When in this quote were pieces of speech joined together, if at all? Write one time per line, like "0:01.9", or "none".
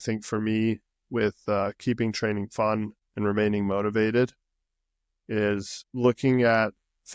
0:03.0
0:05.8

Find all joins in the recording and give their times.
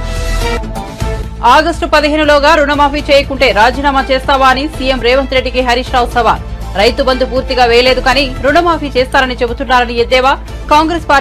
none

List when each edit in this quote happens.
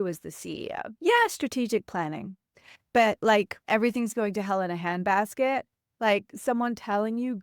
0:03.6

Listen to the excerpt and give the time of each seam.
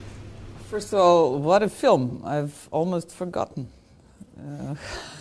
none

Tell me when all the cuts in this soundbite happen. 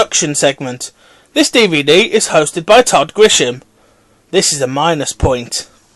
none

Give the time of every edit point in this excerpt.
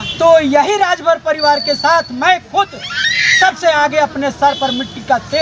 none

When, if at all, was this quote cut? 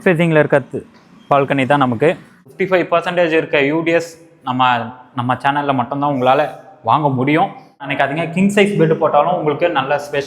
0:02.5
0:07.9

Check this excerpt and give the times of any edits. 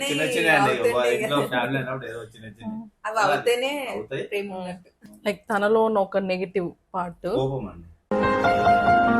0:04.9

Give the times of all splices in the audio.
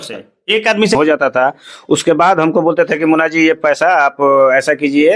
0:01.0

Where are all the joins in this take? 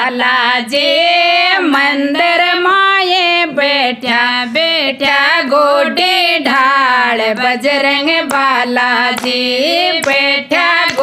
none

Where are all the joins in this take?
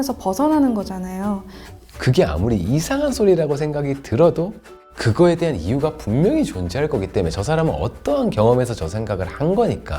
0:01.7

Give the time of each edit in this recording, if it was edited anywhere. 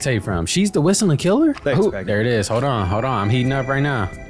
0:01.6

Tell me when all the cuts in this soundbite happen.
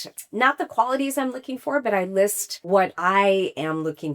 0:02.8

